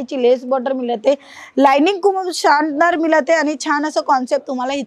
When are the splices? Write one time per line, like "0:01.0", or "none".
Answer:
none

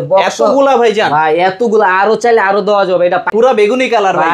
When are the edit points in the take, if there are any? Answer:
0:03.3

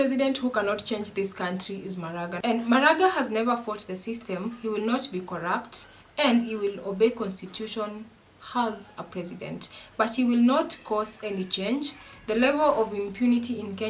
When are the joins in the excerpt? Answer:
0:02.3

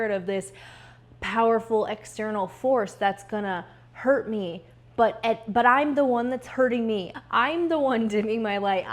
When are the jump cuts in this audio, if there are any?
0:07.1

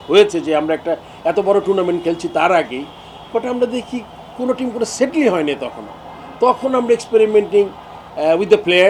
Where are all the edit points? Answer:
none

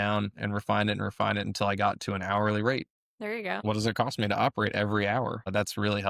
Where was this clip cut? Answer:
none

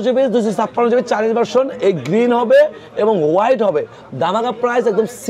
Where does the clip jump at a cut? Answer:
none

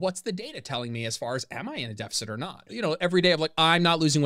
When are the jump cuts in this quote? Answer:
0:02.7

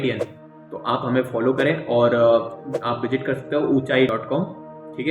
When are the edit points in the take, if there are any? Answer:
0:04.1

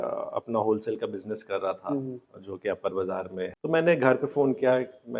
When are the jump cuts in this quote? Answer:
none

